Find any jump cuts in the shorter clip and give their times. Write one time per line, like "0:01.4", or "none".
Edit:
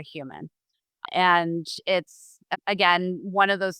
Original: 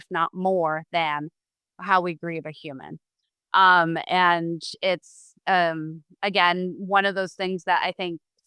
0:01.0
0:02.4